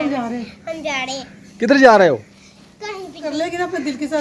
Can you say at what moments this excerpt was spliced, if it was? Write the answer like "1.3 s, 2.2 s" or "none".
3.2 s